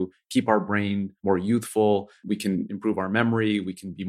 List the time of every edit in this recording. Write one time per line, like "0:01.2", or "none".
0:01.1
0:02.2